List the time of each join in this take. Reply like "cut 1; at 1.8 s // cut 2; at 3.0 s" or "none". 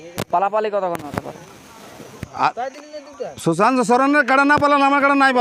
none